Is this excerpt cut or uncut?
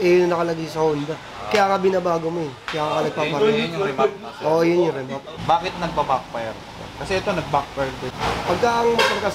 cut